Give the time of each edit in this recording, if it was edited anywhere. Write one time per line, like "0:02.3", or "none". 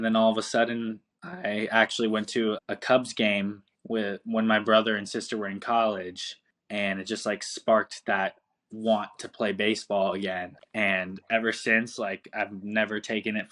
0:02.6

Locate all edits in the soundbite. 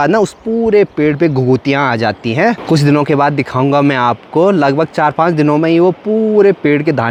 none

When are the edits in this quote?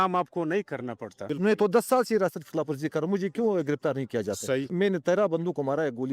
0:01.3
0:04.7

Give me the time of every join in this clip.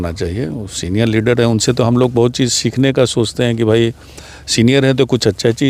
none

